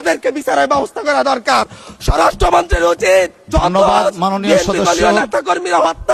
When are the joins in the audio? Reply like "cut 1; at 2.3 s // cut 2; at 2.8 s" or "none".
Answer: none